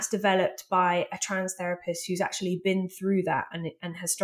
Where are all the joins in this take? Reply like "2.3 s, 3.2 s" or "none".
none